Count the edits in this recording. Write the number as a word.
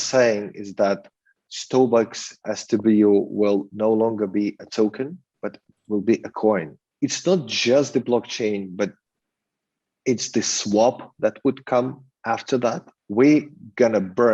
two